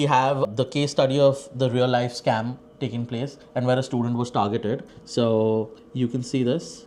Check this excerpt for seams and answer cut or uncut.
uncut